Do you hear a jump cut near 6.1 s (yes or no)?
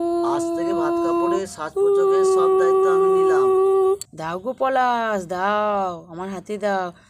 no